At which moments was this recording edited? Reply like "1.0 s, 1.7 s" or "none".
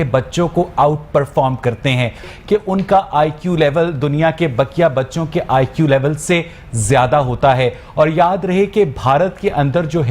2.3 s